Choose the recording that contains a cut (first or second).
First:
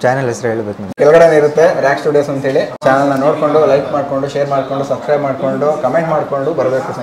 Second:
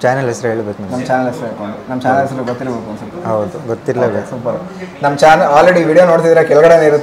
first